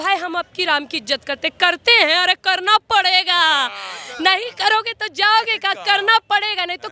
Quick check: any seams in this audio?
no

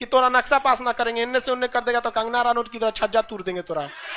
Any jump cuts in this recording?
no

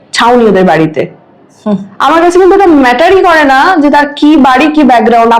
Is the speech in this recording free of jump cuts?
yes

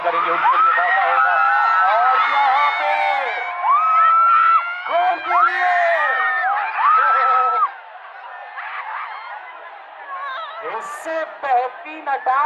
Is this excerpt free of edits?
yes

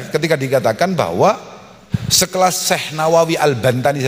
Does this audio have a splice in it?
yes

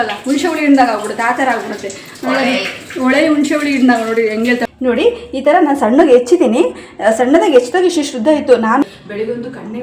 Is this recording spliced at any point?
yes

